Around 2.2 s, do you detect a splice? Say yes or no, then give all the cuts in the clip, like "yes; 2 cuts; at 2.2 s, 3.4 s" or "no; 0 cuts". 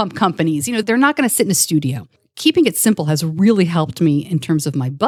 yes; 1 cut; at 2.2 s